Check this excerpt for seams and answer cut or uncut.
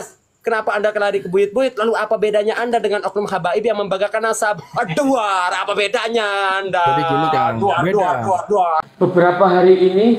cut